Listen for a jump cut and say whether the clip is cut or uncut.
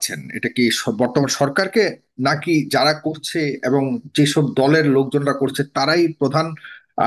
uncut